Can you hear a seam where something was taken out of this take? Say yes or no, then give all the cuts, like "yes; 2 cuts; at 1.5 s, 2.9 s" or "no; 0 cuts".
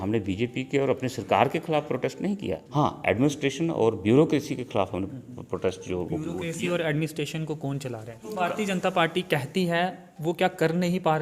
yes; 2 cuts; at 2.6 s, 8.3 s